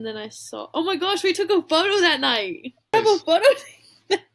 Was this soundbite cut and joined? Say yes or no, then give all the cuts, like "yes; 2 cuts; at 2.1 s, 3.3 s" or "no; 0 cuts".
yes; 1 cut; at 2.9 s